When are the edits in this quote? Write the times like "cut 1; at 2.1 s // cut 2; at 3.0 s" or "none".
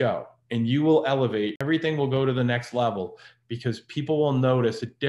cut 1; at 1.6 s